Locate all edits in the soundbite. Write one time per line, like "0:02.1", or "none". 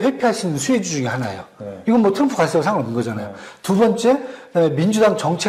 none